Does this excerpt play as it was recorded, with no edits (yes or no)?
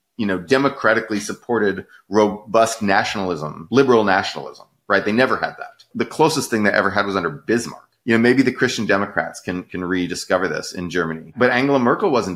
no